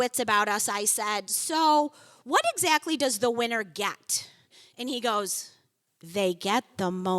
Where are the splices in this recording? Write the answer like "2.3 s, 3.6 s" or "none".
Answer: 4.6 s